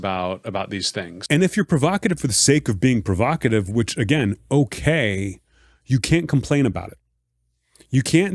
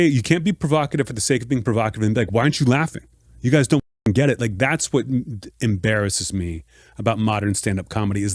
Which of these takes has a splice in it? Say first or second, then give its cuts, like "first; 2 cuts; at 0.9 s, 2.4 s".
first; 1 cut; at 1.2 s